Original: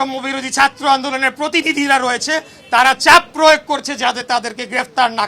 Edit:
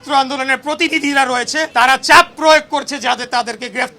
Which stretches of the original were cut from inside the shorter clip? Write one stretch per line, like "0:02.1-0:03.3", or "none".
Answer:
0:02.4-0:02.6